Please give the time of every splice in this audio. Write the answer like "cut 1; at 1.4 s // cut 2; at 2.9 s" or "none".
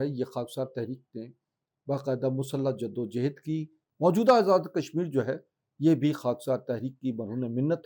cut 1; at 3.8 s